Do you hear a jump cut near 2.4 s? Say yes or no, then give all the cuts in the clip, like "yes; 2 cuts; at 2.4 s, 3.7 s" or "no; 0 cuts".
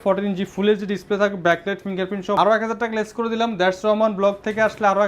yes; 1 cut; at 2.4 s